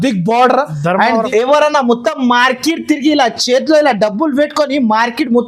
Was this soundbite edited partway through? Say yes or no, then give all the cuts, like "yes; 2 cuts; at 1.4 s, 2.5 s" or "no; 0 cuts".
yes; 1 cut; at 1.3 s